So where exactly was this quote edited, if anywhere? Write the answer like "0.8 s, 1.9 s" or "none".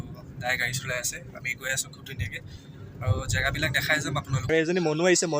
4.5 s